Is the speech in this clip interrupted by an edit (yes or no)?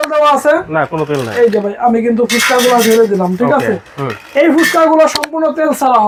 no